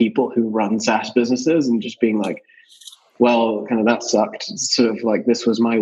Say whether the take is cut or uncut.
uncut